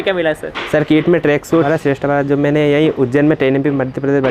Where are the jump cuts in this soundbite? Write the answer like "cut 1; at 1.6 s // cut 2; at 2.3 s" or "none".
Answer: cut 1; at 1.7 s